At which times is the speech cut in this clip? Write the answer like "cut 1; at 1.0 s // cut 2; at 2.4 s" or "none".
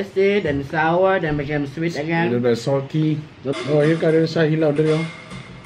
cut 1; at 3.4 s